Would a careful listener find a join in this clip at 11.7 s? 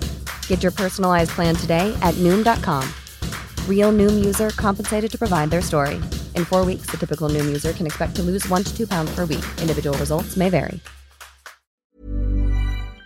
yes; 1 cut; at 11.7 s

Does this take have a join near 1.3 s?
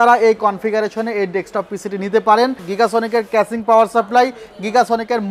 no; 1 cut; at 2.7 s

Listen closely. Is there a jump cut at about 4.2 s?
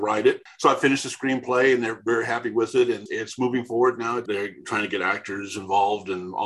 yes; 1 cut; at 4.2 s

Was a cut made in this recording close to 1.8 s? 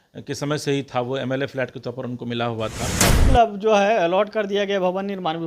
no; 1 cut; at 3.2 s

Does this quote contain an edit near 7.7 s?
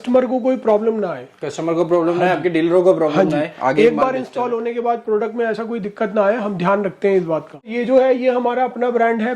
yes; 1 cut; at 7.7 s

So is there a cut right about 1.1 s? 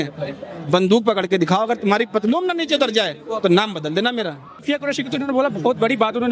no; 1 cut; at 4.5 s

